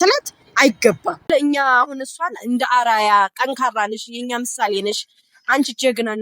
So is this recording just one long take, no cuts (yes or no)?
no